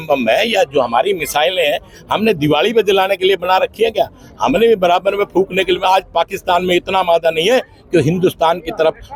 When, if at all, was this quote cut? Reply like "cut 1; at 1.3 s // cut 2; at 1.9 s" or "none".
none